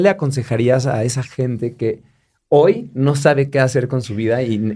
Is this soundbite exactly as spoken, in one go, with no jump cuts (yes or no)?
yes